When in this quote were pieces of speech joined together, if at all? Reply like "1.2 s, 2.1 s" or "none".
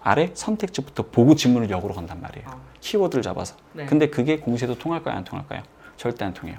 none